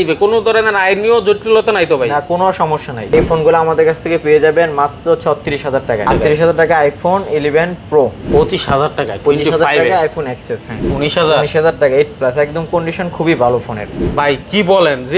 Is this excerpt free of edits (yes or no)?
no